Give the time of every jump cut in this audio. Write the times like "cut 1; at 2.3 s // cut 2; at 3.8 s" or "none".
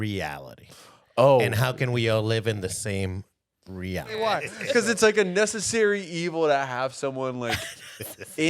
cut 1; at 4.2 s